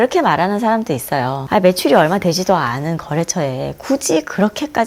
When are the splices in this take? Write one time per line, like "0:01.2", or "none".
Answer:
none